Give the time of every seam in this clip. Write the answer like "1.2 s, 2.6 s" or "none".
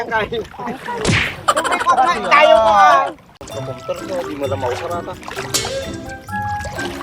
3.3 s